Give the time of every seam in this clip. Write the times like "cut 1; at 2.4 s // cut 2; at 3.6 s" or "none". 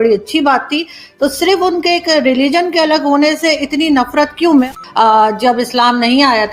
cut 1; at 4.6 s